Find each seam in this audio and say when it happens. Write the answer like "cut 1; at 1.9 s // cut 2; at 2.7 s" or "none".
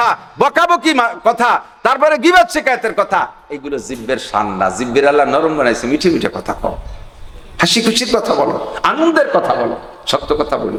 none

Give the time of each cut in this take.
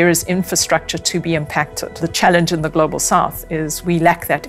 cut 1; at 1.9 s

